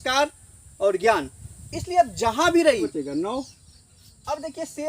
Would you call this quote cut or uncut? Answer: cut